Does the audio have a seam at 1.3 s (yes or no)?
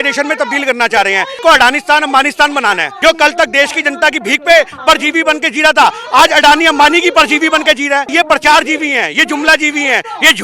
yes